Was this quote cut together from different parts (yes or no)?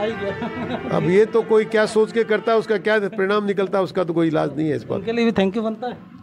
no